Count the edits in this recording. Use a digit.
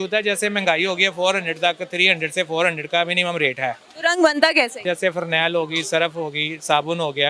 2